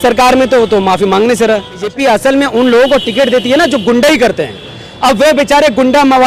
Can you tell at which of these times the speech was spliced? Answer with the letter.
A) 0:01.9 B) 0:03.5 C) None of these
A